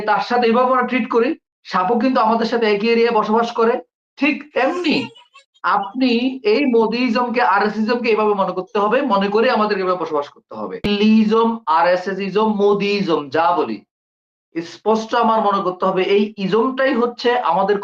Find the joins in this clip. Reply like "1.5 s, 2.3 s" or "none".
10.9 s